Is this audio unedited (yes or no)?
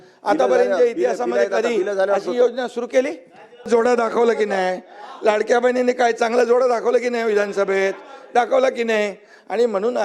no